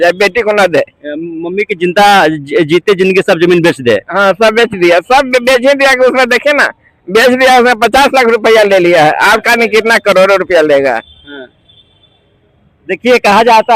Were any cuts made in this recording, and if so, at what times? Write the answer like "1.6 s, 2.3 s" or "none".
none